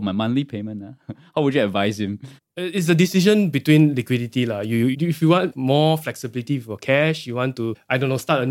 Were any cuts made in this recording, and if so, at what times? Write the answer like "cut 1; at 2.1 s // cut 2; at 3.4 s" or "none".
cut 1; at 5.5 s